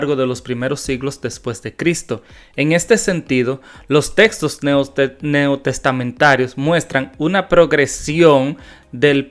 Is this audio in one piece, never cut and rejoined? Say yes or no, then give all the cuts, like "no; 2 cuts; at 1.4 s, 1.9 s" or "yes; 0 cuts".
yes; 0 cuts